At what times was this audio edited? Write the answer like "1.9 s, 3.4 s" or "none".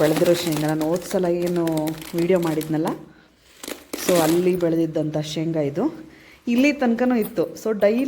none